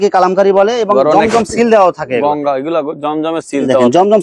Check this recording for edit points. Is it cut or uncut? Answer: uncut